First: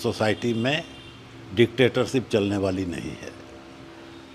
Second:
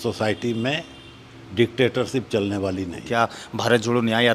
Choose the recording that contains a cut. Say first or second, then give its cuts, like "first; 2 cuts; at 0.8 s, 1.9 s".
second; 1 cut; at 3.0 s